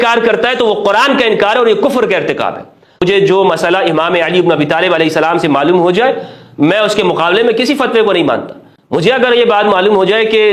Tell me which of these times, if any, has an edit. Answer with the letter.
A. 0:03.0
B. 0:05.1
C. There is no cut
A